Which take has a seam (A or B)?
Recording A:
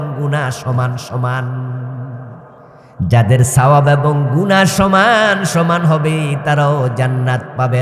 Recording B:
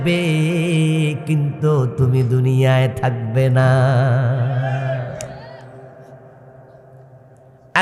A